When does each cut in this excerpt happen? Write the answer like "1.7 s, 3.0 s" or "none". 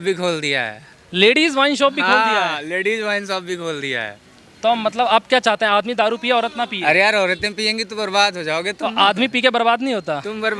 none